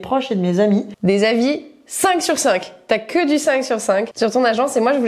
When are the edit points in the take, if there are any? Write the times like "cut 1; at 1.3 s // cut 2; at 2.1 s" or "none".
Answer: cut 1; at 0.9 s